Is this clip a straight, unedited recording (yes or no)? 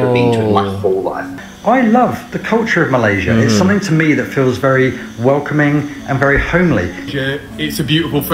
no